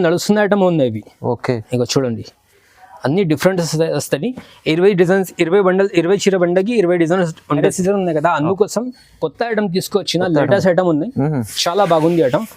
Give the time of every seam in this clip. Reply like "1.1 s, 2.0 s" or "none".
7.6 s

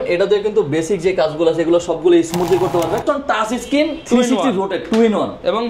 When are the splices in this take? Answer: 3.0 s

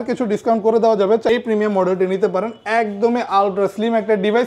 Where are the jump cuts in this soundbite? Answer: 1.3 s

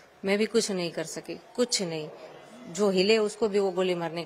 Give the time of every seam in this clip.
none

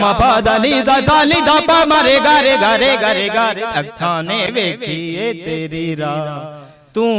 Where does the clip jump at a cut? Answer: none

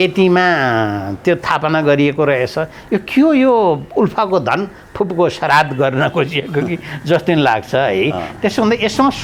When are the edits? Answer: none

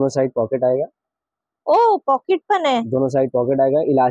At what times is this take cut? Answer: none

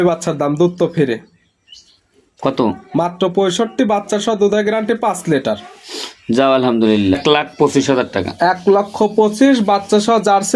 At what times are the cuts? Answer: 7.2 s

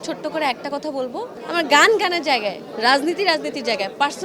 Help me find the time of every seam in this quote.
1.4 s

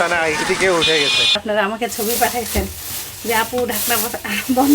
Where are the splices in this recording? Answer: 1.4 s

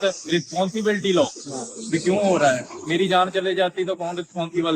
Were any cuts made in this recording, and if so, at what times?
none

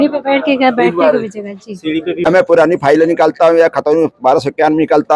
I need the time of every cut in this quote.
2.3 s

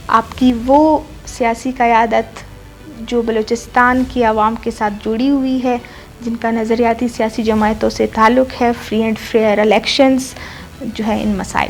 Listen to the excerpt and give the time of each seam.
none

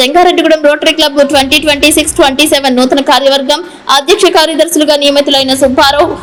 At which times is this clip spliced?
none

